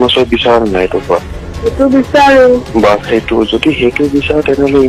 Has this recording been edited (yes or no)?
no